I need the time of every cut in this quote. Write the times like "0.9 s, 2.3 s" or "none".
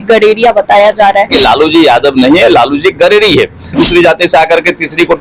1.3 s, 3.8 s